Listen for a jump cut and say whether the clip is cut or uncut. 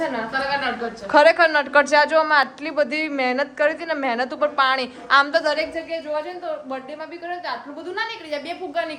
uncut